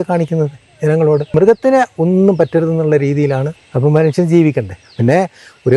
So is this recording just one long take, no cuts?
no; 2 cuts; at 1.3 s, 3.6 s

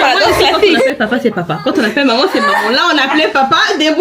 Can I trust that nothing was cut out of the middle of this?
no; 1 cut; at 0.9 s

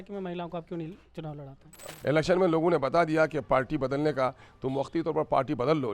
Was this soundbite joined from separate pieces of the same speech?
yes; 1 cut; at 1.9 s

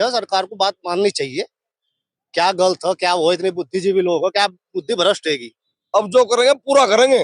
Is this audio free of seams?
no; 1 cut; at 5.7 s

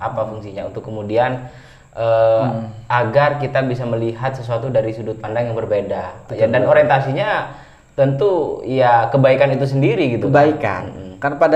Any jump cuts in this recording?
no; 0 cuts

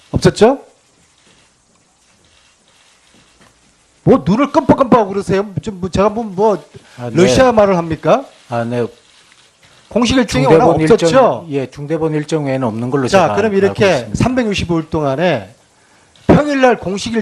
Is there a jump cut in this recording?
yes; 1 cut; at 6.2 s

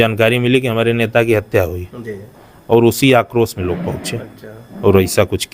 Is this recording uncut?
yes; 0 cuts

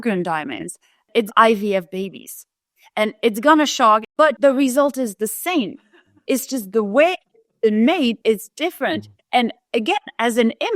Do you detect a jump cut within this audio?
yes; 2 cuts; at 1.1 s, 4.2 s

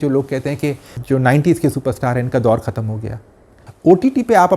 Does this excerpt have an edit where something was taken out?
yes; 2 cuts; at 0.9 s, 3.7 s

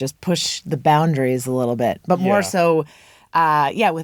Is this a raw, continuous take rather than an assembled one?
yes; 0 cuts

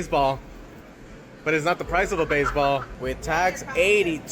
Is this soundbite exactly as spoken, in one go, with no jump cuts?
no; 1 cut; at 2.9 s

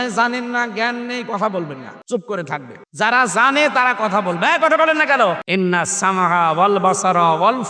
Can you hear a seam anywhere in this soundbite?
yes; 3 cuts; at 1.9 s, 2.8 s, 5.4 s

